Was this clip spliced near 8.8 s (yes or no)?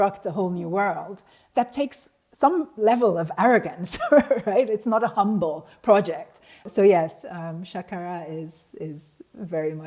no